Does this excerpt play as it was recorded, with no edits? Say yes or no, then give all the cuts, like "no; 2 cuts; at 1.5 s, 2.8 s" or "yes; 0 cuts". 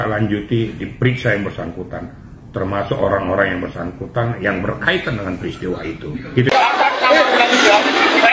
no; 1 cut; at 6.5 s